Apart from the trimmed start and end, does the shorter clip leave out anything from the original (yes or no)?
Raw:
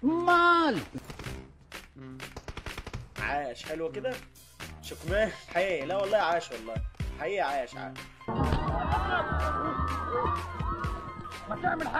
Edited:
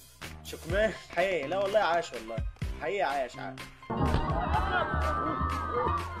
no